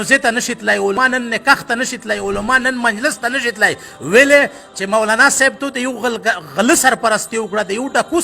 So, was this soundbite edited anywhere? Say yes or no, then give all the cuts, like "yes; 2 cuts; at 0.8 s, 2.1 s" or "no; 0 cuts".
yes; 1 cut; at 1.0 s